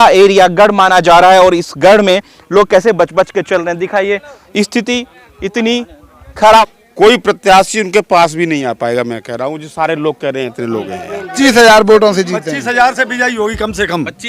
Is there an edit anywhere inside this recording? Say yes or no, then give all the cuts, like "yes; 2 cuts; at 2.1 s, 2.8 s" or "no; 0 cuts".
yes; 2 cuts; at 6.7 s, 11.3 s